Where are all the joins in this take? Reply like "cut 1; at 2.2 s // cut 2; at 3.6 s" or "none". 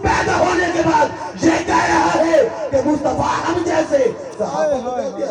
none